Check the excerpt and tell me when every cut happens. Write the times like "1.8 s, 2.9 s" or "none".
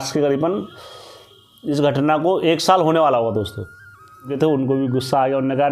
4.3 s